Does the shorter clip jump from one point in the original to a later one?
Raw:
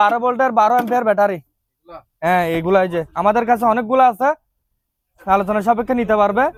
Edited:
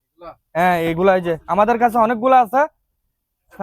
no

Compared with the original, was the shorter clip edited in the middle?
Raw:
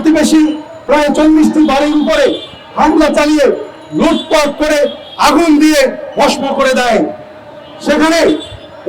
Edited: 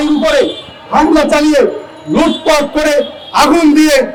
no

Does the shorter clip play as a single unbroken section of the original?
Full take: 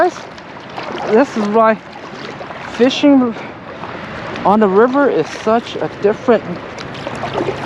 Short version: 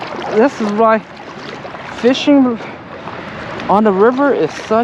yes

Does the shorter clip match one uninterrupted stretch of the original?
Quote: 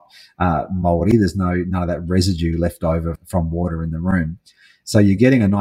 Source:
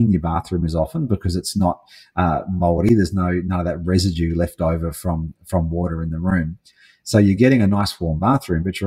no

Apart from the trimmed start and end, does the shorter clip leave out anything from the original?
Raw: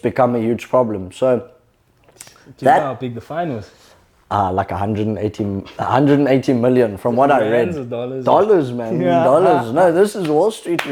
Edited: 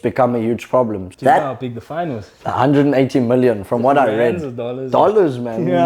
yes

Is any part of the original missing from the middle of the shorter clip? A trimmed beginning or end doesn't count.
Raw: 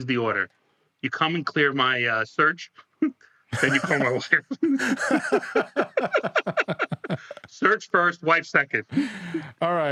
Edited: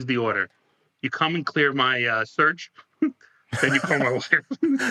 no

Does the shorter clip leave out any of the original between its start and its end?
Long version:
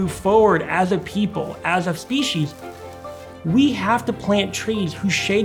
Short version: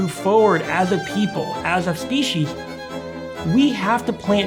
no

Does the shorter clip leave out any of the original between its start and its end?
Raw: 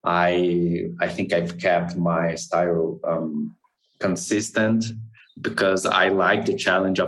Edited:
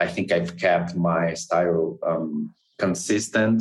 yes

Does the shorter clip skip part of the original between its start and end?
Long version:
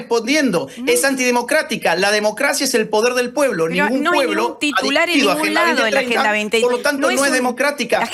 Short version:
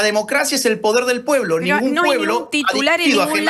no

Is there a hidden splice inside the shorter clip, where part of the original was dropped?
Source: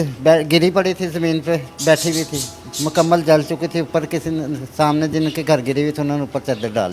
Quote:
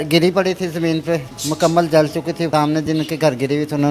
yes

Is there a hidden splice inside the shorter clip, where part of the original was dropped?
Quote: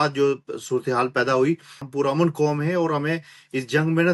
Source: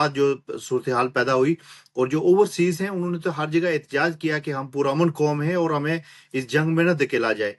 yes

